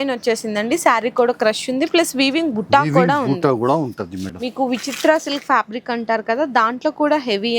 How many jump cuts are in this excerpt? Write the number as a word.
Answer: one